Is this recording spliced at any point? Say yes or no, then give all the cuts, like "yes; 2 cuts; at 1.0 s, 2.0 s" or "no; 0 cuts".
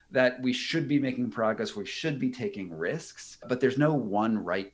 yes; 1 cut; at 3.4 s